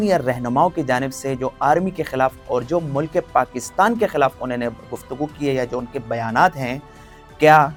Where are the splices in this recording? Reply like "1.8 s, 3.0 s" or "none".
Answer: none